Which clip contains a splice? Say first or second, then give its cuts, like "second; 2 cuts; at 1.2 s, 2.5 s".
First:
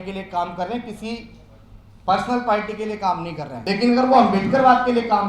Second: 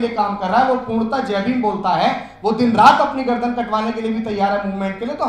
first; 1 cut; at 3.5 s